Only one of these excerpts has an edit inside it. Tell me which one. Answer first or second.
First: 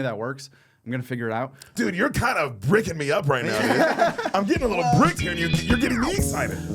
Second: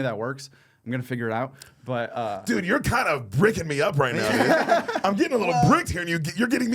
first